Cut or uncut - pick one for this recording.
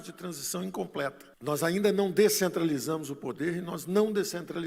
uncut